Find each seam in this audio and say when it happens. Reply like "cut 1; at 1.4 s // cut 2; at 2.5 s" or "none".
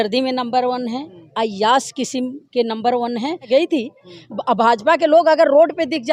cut 1; at 3.5 s